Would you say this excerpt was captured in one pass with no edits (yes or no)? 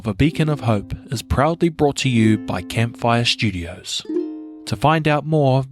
no